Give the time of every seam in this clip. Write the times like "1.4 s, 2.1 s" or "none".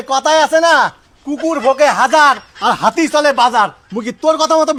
none